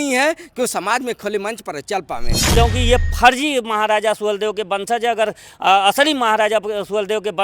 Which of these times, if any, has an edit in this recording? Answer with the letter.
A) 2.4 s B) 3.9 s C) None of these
A